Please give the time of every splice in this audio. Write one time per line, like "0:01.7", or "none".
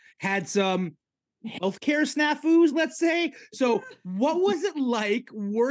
none